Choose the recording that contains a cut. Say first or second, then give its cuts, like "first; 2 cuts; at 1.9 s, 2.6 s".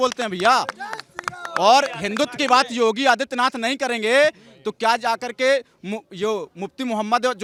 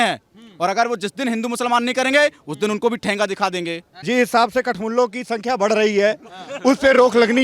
second; 1 cut; at 4.0 s